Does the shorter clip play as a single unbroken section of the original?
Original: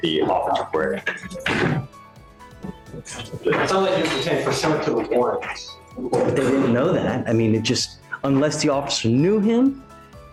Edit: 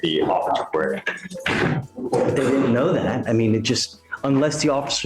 no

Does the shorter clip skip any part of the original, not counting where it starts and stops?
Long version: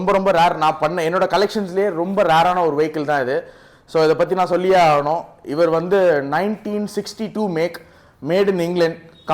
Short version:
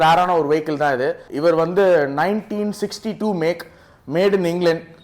yes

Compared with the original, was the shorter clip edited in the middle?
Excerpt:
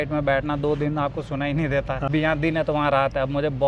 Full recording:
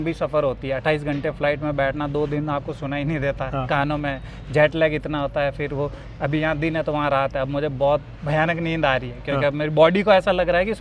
yes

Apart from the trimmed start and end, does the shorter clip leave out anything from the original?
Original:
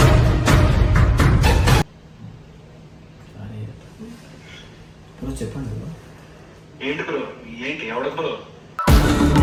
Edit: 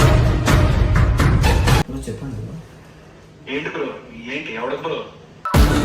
yes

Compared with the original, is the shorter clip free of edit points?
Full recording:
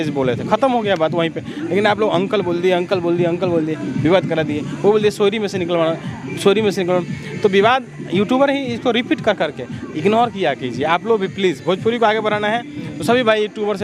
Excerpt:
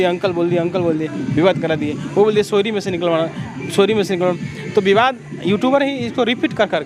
yes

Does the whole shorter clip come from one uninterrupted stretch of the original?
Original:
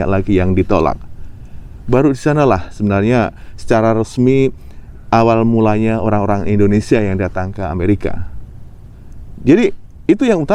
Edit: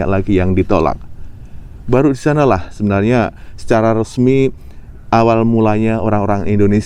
yes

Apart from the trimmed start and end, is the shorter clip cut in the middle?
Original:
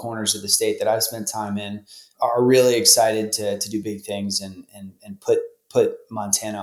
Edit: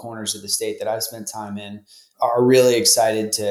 no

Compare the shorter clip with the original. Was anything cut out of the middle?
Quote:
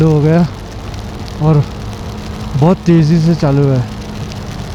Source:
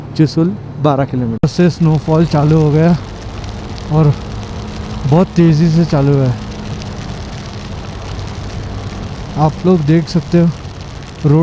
no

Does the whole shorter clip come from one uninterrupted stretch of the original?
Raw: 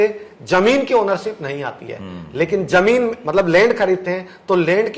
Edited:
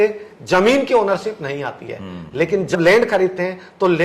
no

